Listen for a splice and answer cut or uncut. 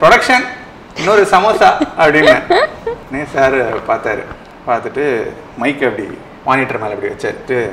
uncut